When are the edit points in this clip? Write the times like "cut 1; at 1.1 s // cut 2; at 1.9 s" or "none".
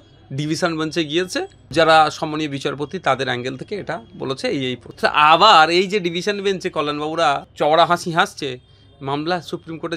cut 1; at 1.6 s // cut 2; at 4.9 s // cut 3; at 7.5 s